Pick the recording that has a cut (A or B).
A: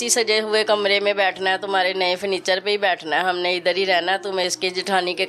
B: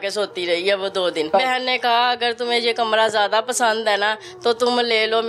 B